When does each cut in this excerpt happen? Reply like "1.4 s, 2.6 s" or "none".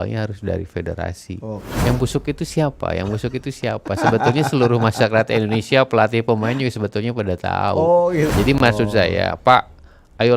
1.7 s, 8.3 s